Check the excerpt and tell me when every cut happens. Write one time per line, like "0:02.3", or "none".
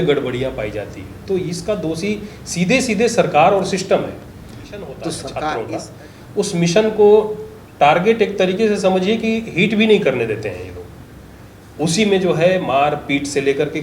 0:05.6